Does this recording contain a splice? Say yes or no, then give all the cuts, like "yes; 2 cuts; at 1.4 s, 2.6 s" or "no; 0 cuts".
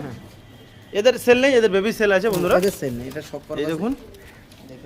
no; 0 cuts